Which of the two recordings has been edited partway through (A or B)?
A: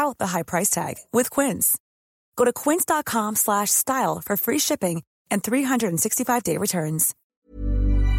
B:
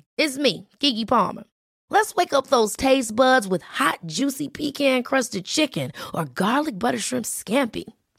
A